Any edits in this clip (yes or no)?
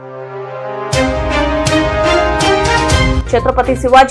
yes